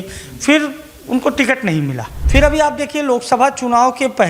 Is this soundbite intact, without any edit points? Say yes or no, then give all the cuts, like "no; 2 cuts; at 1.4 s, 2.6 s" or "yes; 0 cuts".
no; 1 cut; at 2.1 s